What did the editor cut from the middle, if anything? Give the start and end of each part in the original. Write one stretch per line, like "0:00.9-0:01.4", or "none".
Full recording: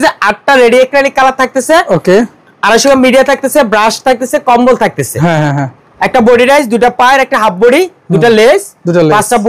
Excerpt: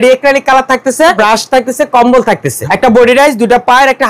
0:01.9-0:03.7
0:05.1-0:05.8